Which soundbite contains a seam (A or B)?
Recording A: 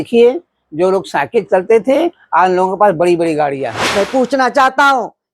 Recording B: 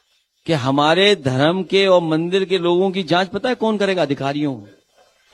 A